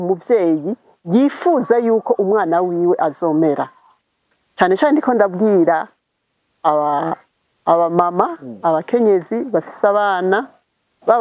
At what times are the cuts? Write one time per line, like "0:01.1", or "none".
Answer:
none